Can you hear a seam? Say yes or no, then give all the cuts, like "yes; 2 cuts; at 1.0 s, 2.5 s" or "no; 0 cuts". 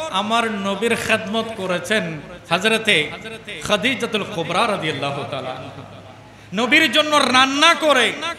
yes; 1 cut; at 2.3 s